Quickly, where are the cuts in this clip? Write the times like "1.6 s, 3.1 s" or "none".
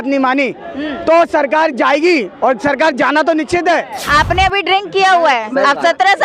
4.0 s